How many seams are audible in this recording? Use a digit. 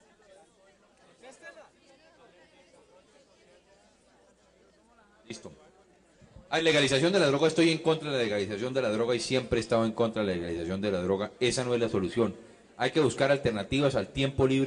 0